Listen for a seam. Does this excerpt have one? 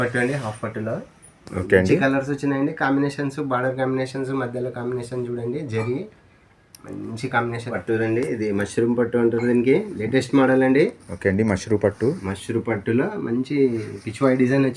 yes; 1 cut; at 7.7 s

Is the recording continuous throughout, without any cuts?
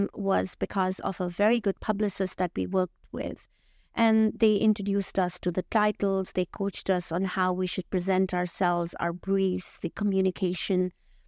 yes; 0 cuts

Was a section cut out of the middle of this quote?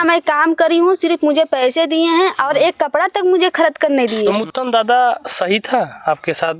yes; 1 cut; at 4.3 s

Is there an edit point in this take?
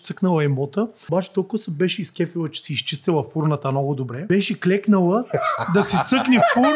yes; 2 cuts; at 1.0 s, 4.2 s

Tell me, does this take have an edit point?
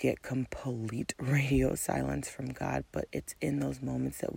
no; 0 cuts

